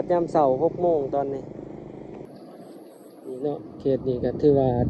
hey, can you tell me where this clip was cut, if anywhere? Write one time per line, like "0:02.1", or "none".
0:02.3